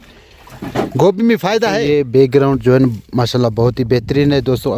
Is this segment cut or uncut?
cut